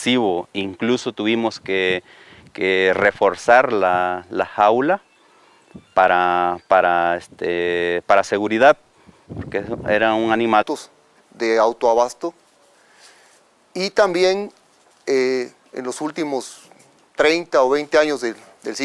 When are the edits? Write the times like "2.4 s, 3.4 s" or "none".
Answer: none